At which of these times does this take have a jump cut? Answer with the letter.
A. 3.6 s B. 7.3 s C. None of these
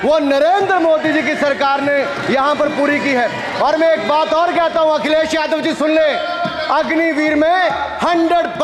C